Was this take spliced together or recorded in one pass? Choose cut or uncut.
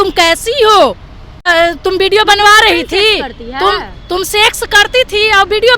cut